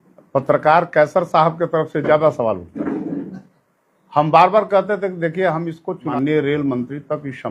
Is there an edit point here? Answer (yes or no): yes